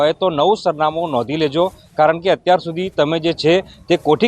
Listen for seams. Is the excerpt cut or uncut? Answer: cut